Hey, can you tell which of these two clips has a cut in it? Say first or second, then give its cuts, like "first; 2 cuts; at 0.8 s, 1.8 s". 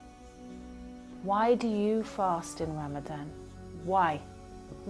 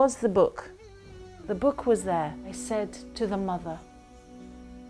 second; 1 cut; at 2.5 s